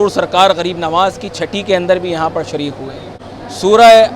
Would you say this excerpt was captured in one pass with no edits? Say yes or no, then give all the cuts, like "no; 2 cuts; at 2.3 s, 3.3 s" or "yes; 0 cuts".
no; 1 cut; at 3.2 s